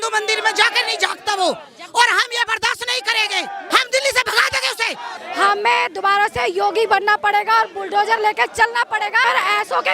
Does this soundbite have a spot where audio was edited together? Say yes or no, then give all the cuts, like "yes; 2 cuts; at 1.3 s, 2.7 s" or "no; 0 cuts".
yes; 3 cuts; at 3.7 s, 5.2 s, 9.2 s